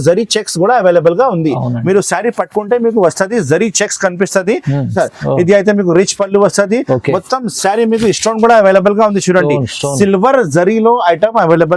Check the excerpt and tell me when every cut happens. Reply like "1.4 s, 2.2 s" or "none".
4.9 s